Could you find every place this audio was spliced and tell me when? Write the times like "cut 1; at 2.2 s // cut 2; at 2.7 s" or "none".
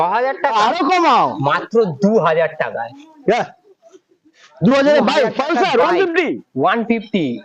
none